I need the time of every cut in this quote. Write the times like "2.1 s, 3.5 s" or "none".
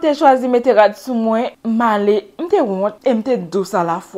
1.6 s, 3.0 s